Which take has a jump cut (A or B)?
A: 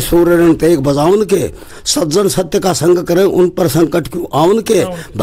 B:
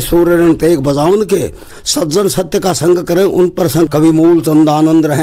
B